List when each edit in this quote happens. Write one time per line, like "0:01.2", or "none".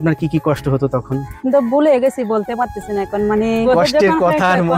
0:01.3
0:03.7